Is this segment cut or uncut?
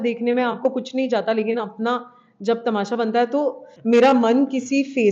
cut